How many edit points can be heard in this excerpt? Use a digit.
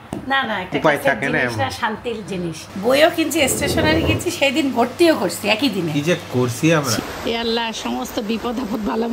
2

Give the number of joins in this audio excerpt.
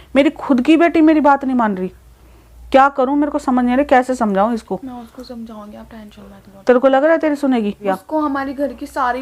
1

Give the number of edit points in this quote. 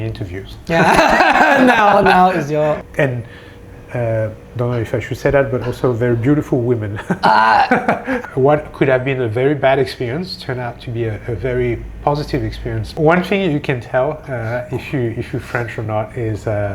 3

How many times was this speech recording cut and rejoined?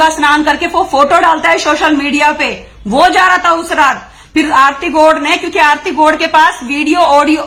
0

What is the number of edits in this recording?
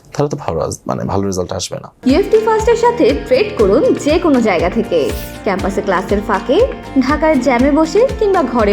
1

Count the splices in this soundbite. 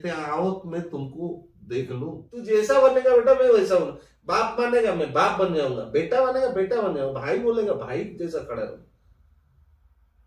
1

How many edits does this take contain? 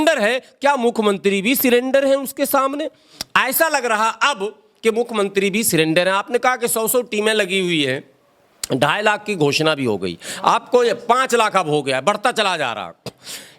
0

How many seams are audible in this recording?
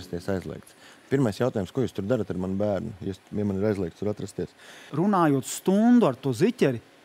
1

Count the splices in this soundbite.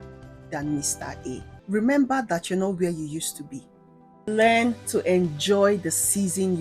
2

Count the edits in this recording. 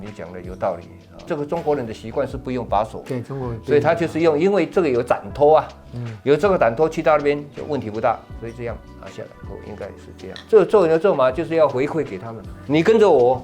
1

